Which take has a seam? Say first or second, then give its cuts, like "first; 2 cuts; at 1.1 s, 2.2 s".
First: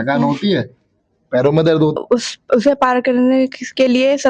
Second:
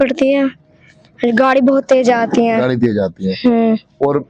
first; 1 cut; at 2.0 s